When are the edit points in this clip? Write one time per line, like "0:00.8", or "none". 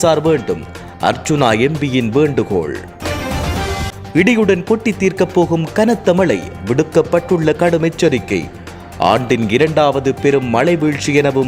none